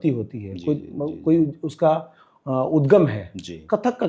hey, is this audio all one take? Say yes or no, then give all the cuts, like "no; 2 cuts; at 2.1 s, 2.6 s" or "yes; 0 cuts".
yes; 0 cuts